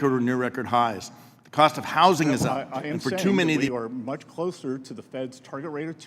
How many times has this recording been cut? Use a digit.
1